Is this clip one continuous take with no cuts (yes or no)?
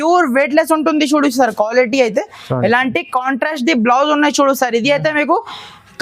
yes